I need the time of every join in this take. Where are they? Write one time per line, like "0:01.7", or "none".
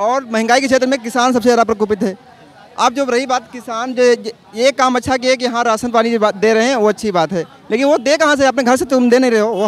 none